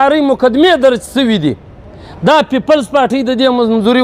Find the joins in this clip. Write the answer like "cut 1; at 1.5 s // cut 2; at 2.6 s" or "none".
none